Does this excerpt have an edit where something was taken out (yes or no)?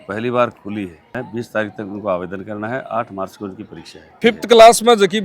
yes